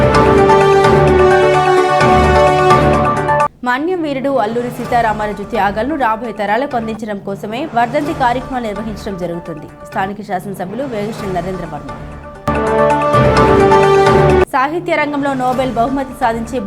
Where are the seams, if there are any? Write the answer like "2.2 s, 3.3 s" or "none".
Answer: 1.5 s